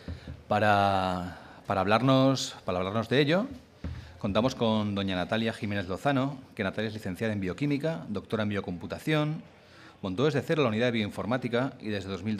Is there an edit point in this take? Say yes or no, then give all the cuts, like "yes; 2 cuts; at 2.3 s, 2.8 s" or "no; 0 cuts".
yes; 1 cut; at 9.4 s